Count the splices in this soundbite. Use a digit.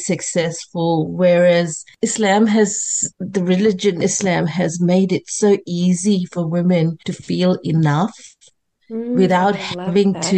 3